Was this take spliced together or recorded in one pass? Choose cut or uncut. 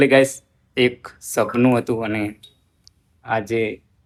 uncut